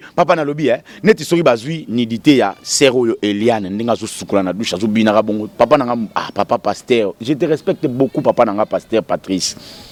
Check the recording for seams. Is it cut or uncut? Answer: uncut